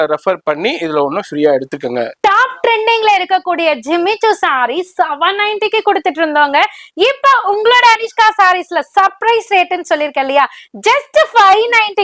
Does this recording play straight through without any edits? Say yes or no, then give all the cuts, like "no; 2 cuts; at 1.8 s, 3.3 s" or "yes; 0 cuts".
yes; 0 cuts